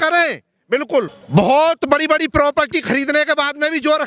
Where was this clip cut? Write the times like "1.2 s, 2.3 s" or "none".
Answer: 1.2 s